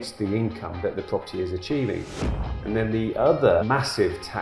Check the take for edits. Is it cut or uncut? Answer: cut